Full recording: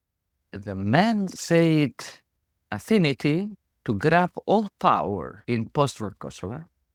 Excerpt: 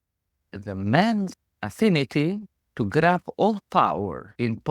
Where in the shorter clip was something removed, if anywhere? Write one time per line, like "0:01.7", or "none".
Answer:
0:01.4